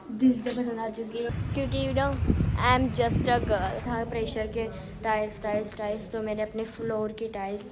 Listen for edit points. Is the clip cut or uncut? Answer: cut